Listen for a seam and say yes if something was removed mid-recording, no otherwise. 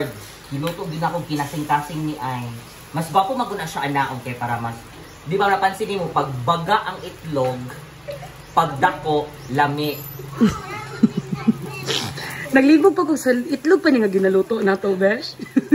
no